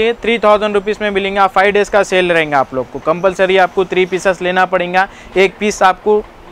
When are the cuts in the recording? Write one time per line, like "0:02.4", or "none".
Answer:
none